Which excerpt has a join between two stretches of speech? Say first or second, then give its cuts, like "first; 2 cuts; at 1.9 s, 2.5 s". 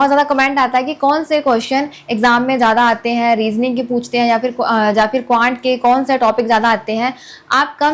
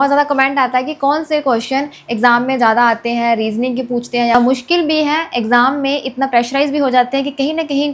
second; 1 cut; at 4.3 s